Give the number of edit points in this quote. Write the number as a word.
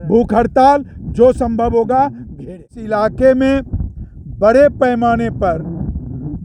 one